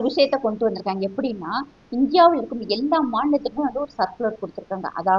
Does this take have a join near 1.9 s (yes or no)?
no